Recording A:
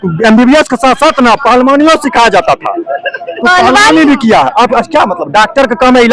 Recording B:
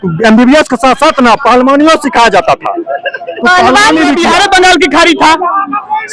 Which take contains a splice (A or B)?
B